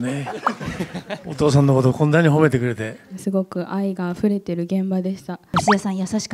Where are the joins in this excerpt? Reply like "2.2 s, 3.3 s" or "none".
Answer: 3.1 s, 5.5 s